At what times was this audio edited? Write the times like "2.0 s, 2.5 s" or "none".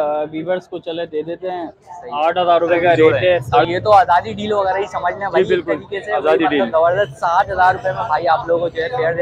3.6 s